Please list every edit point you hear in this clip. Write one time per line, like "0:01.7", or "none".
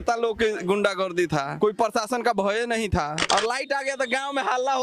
0:01.5
0:03.2